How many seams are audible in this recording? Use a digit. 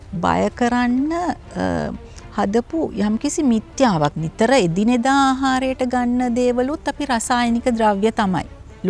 1